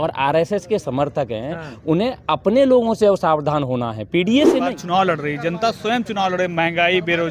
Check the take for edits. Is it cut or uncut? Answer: cut